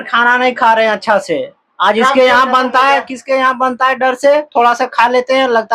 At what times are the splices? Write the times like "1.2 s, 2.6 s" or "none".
none